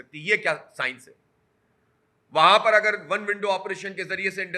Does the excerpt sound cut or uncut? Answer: uncut